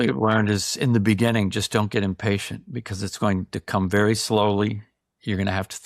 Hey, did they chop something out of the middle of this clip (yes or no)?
no